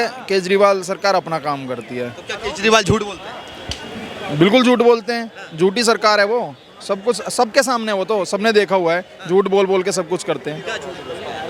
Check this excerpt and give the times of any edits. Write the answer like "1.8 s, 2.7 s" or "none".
none